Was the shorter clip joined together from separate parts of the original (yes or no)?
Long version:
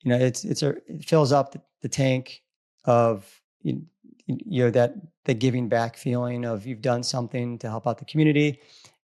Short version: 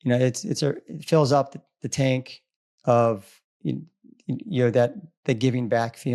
no